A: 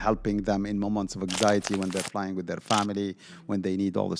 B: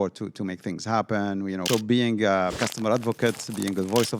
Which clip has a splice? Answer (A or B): B